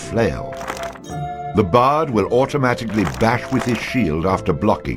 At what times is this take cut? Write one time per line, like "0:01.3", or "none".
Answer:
0:00.9